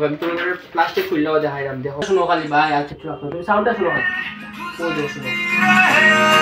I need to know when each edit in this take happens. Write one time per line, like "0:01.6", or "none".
0:02.1